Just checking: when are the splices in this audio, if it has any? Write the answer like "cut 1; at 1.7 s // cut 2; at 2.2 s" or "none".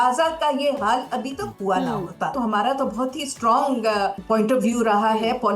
cut 1; at 2.3 s // cut 2; at 4.2 s